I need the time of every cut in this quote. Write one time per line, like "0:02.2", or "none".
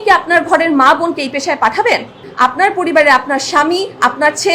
0:02.2